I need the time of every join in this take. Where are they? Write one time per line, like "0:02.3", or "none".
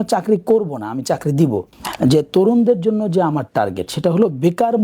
0:01.8